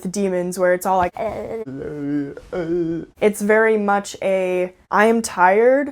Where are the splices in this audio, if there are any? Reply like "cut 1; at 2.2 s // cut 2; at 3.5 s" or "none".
cut 1; at 4.8 s